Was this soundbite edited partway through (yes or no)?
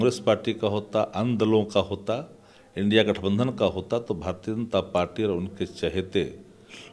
no